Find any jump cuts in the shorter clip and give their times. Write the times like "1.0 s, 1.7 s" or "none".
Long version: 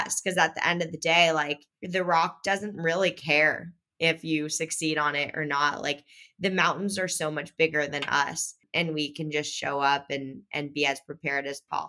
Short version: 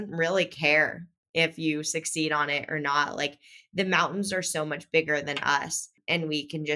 none